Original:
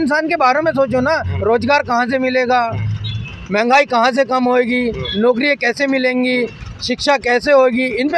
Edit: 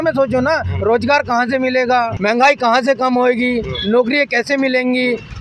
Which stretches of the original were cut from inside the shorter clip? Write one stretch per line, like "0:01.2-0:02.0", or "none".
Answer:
0:02.7-0:03.4